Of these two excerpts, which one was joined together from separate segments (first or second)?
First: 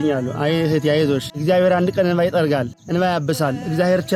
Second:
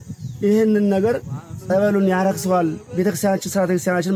first